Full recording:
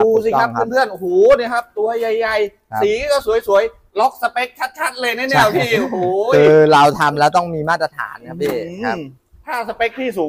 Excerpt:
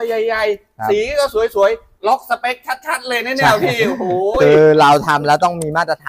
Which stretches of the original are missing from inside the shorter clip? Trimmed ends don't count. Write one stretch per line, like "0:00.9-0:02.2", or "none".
none